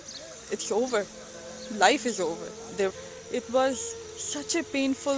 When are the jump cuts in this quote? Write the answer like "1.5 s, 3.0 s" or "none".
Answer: 2.9 s